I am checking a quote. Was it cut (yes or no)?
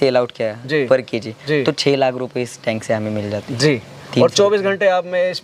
no